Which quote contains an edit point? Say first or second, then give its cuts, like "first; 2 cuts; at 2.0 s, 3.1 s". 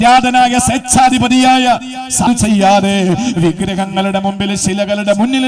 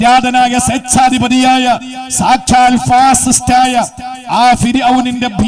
first; 1 cut; at 2.3 s